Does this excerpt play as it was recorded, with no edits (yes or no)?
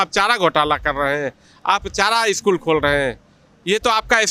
yes